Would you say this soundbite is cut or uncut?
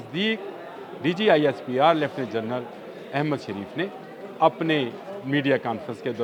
uncut